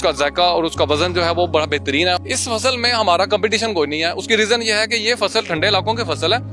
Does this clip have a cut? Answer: yes; 1 cut; at 2.2 s

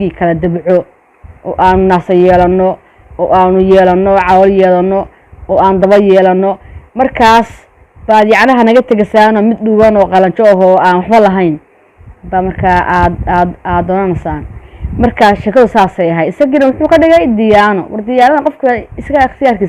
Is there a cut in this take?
no; 0 cuts

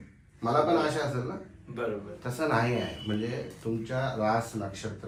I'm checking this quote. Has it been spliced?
no; 0 cuts

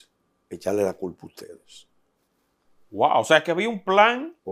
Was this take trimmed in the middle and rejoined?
no; 0 cuts

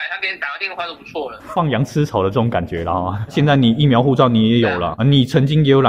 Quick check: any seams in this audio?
yes; 3 cuts; at 1.5 s, 3.3 s, 4.9 s

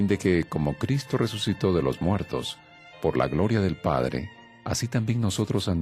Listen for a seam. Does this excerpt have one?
yes; 1 cut; at 2.9 s

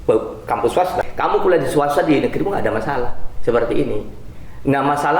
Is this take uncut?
no; 1 cut; at 1.0 s

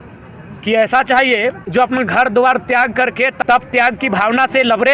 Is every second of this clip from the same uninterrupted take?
no; 2 cuts; at 1.6 s, 3.3 s

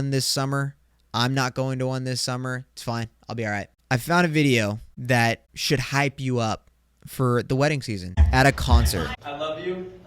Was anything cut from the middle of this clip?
yes; 5 cuts; at 3.7 s, 4.9 s, 5.5 s, 8.2 s, 9.1 s

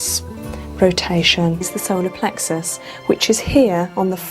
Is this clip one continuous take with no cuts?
no; 1 cut; at 1.7 s

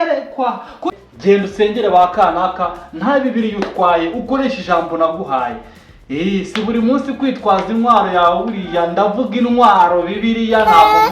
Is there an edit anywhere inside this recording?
yes; 1 cut; at 0.9 s

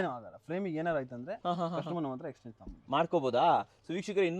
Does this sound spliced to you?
no; 0 cuts

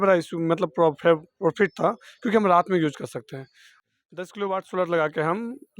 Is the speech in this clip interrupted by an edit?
yes; 1 cut; at 3.7 s

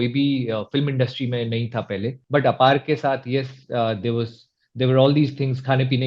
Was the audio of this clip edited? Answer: yes; 1 cut; at 2.2 s

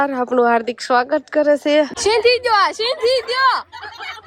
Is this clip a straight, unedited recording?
no; 1 cut; at 1.9 s

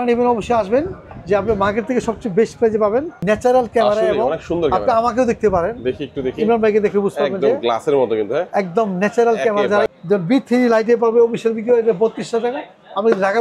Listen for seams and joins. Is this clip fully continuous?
no; 2 cuts; at 3.2 s, 9.9 s

